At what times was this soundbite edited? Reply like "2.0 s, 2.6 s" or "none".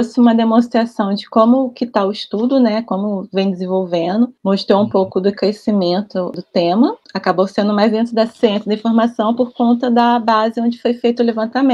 none